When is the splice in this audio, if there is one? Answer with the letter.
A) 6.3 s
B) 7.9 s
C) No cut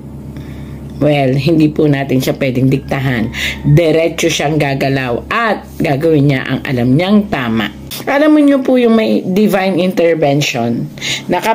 B